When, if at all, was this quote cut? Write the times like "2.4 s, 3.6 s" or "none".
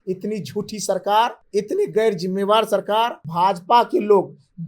1.4 s, 3.2 s